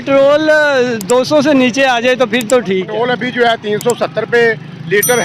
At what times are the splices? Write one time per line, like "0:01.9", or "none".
0:02.9